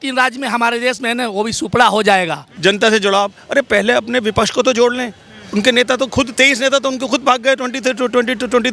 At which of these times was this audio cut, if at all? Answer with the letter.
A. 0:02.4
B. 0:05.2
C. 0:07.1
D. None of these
A